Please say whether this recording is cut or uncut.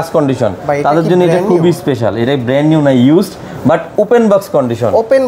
uncut